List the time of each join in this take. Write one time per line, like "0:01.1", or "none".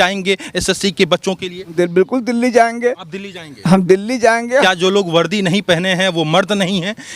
0:01.7
0:04.6